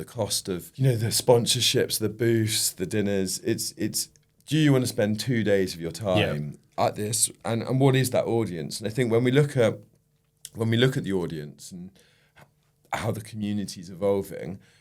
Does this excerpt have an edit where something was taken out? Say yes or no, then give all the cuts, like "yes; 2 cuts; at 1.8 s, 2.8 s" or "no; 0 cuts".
no; 0 cuts